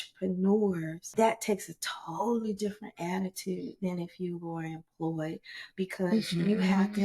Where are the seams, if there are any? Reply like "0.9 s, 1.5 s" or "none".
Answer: 1.0 s